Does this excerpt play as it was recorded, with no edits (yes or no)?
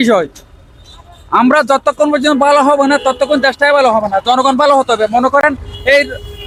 yes